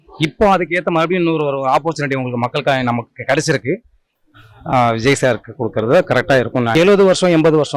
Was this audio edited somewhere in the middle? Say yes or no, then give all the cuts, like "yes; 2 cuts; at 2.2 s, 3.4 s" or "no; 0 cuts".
yes; 2 cuts; at 4.1 s, 6.7 s